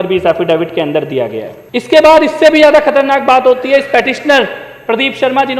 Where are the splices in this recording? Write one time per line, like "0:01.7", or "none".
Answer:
0:01.6